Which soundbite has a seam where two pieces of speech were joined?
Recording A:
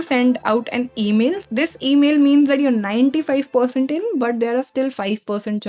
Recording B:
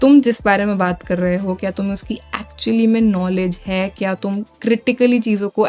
A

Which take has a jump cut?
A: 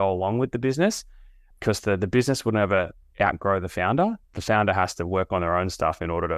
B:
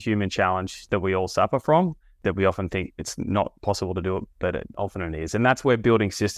B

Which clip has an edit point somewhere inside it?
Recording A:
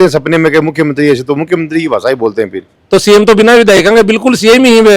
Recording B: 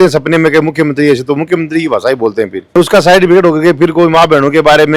A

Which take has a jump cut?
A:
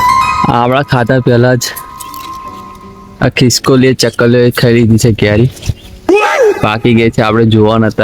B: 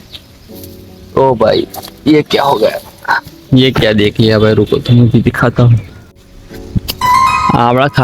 B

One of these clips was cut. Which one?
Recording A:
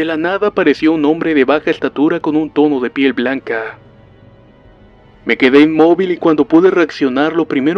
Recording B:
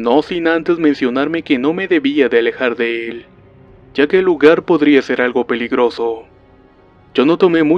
A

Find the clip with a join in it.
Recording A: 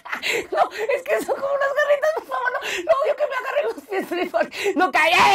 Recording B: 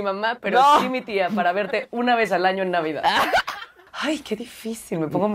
B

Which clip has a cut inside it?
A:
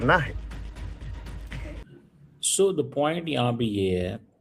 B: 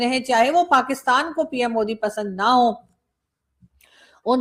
A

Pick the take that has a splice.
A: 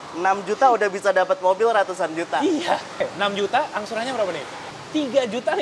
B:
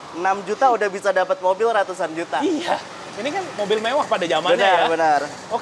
A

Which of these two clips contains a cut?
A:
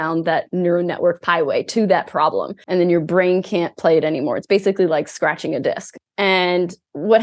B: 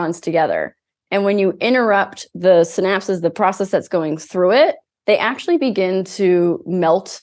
A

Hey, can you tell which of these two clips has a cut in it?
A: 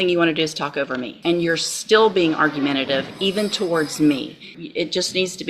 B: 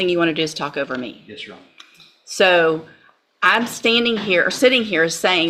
A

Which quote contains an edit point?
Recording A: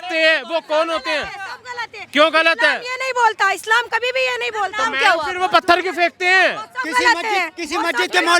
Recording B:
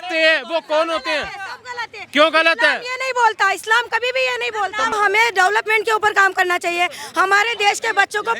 B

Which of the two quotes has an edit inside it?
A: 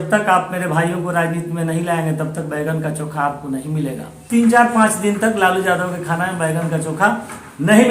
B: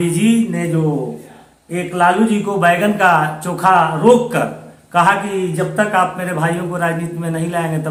A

